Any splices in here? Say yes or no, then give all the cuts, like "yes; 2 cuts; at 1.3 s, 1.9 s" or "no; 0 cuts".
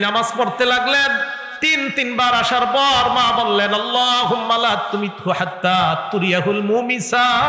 no; 0 cuts